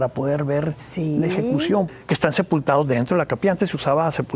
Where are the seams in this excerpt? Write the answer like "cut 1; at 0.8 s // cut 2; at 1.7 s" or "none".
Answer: cut 1; at 1.9 s